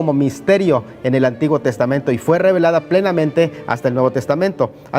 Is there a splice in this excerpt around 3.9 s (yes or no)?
no